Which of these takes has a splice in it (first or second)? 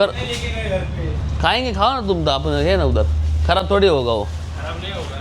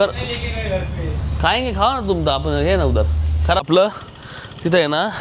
second